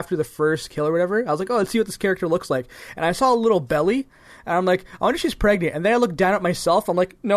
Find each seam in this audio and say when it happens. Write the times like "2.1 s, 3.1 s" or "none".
none